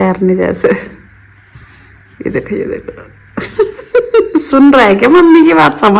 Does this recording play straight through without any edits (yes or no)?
yes